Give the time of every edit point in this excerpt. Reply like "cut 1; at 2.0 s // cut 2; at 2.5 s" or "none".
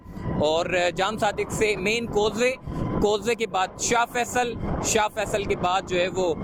none